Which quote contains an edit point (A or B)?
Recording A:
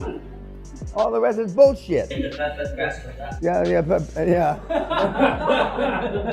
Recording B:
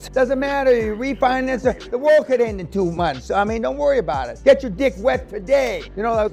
A